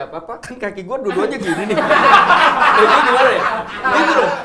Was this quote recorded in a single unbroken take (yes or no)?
yes